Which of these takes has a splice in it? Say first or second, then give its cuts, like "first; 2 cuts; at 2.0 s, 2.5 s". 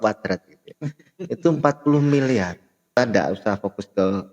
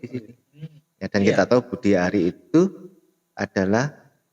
first; 1 cut; at 2.9 s